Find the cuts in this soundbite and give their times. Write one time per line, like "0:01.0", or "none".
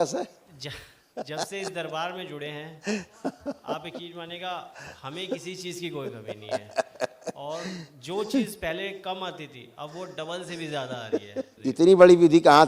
0:11.5